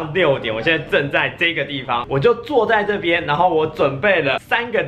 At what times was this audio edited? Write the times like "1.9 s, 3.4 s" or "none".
2.0 s